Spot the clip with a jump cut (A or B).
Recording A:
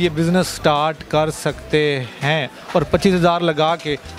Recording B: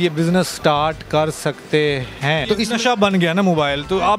B